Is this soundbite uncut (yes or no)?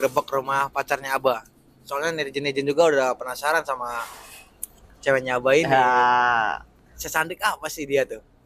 yes